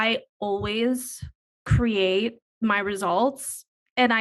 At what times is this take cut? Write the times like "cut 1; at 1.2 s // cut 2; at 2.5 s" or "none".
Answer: cut 1; at 2.4 s